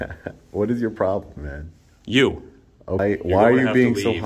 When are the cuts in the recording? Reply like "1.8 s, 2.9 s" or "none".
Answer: 3.0 s